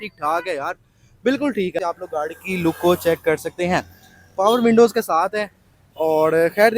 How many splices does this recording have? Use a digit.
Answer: 1